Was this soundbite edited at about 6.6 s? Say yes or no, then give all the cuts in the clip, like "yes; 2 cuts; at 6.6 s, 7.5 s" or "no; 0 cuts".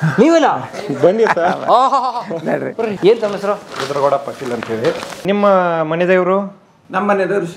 no; 2 cuts; at 2.9 s, 5.1 s